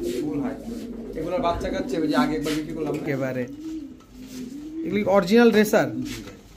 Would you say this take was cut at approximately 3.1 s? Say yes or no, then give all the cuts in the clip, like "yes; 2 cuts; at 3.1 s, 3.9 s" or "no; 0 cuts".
yes; 1 cut; at 3.1 s